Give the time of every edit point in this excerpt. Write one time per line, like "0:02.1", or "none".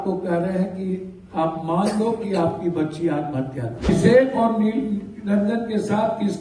0:03.9